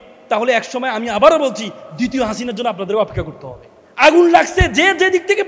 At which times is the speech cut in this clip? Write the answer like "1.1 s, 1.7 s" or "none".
3.8 s

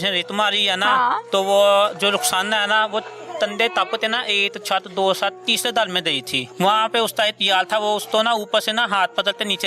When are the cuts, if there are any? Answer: 6.4 s

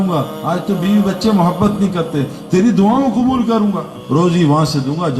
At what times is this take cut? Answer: 4.0 s

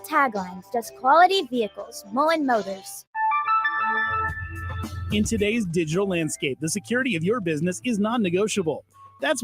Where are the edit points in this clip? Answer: 3.1 s

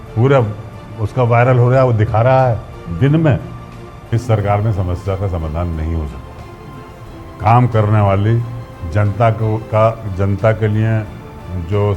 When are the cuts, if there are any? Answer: 4.1 s

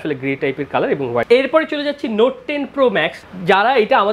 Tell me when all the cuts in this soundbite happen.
1.3 s, 3.2 s

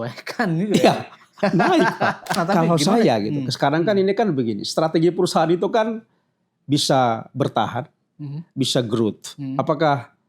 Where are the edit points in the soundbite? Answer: 2.4 s

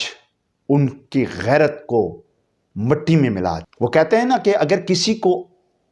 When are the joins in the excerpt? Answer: 3.7 s

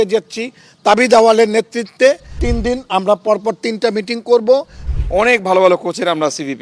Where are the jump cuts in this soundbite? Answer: 2.4 s, 4.8 s

